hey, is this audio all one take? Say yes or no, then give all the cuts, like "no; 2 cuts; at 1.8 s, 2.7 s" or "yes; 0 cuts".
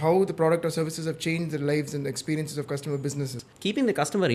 no; 1 cut; at 3.5 s